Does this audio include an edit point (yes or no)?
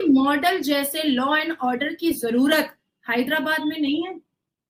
no